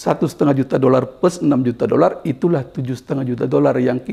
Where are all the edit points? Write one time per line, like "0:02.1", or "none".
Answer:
none